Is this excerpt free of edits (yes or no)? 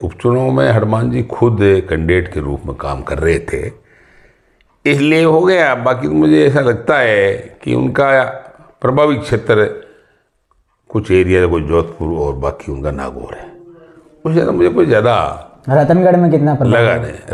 yes